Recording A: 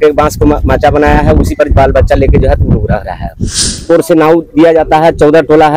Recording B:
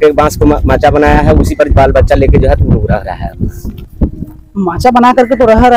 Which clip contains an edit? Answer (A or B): A